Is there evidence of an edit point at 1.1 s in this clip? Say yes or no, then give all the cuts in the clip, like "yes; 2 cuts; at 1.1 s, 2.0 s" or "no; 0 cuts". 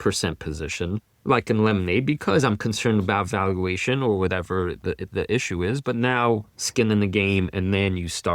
yes; 1 cut; at 1.1 s